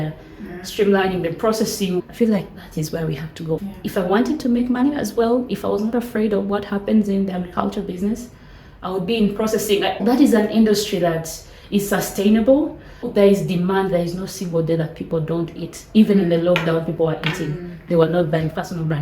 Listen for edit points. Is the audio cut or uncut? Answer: cut